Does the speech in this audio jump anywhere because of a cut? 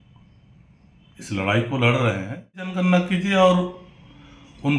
yes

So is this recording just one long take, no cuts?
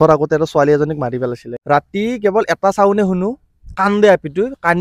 no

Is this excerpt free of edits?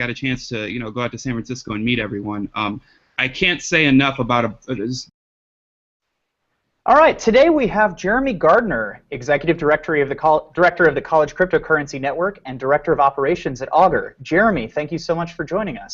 yes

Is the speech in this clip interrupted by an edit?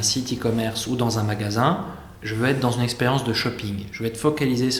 no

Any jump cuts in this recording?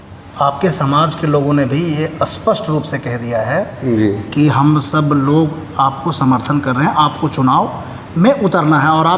no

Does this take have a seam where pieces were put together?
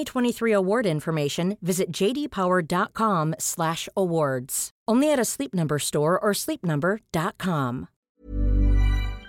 yes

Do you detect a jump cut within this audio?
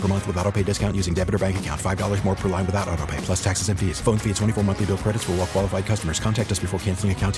no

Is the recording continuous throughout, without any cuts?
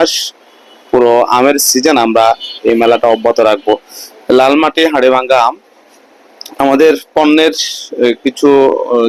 yes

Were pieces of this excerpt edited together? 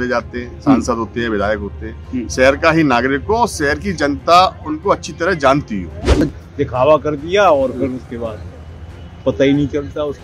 yes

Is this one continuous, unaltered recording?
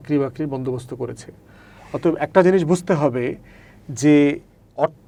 yes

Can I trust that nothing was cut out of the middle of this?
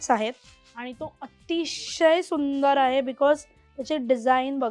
yes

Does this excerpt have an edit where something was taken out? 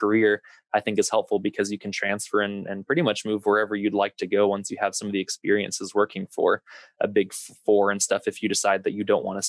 no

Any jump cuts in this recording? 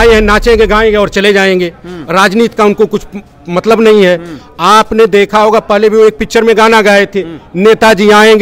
no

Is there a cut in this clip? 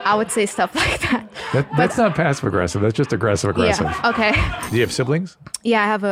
yes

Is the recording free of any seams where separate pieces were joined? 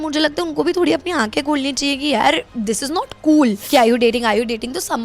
no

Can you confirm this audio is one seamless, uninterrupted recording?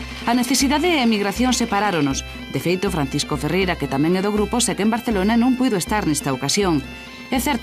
yes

